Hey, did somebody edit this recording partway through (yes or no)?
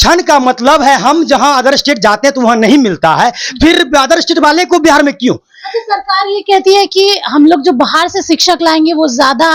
no